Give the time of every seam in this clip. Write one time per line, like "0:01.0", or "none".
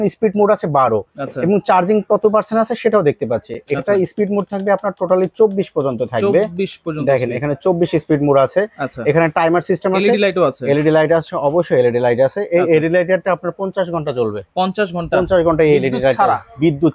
none